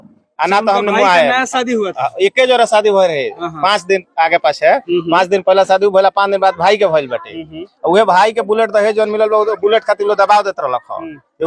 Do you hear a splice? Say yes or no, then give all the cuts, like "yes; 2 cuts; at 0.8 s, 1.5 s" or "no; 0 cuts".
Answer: no; 0 cuts